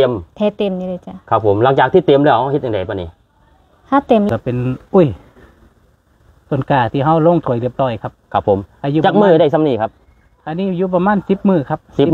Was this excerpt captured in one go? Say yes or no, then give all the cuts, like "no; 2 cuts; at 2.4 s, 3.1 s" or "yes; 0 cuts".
no; 1 cut; at 4.3 s